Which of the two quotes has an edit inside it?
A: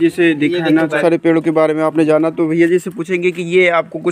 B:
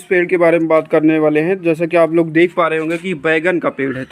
A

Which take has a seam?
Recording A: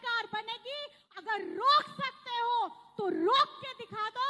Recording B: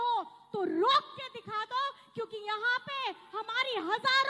A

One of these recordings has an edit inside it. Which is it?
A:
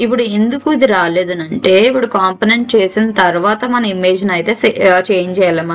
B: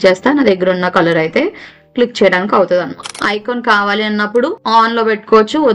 B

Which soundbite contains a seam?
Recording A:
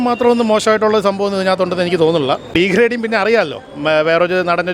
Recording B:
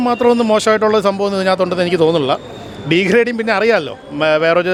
A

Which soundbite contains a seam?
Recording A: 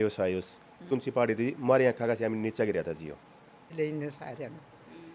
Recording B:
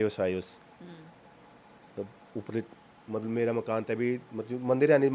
A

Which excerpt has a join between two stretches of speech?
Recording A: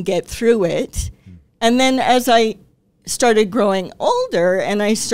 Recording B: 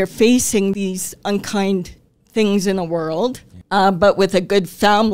B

